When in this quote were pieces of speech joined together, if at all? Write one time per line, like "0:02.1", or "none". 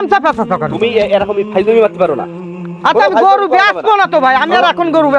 none